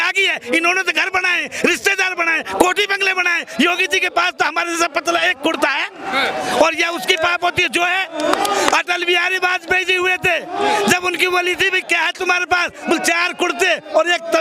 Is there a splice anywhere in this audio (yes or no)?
no